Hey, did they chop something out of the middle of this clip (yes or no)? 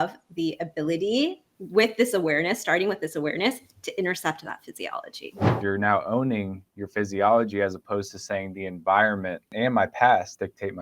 yes